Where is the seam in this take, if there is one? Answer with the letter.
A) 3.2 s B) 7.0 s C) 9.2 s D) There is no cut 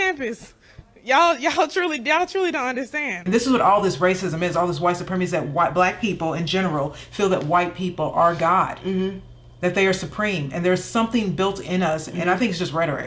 A